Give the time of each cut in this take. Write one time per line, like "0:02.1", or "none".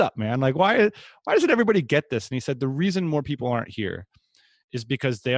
none